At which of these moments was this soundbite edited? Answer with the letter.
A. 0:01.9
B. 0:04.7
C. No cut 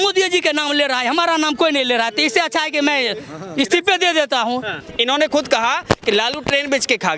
B